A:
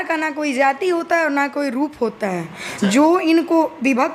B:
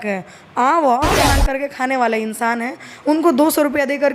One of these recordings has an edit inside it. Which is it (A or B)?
B